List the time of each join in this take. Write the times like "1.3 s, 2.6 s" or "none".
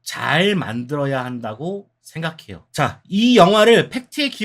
2.6 s